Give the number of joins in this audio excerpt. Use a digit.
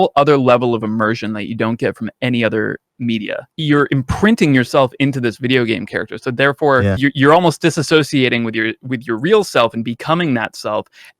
2